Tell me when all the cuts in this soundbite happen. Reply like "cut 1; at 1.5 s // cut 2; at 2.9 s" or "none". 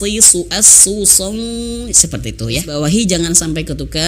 cut 1; at 2.7 s